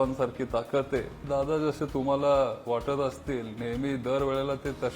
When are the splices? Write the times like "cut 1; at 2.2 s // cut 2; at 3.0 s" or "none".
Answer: cut 1; at 1.2 s